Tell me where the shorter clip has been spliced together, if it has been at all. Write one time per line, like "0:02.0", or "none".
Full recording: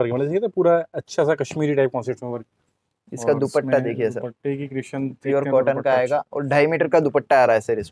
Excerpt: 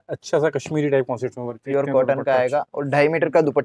0:01.6